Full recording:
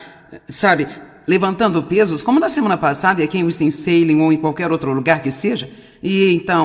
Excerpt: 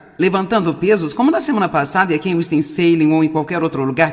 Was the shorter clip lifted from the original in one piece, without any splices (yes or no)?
yes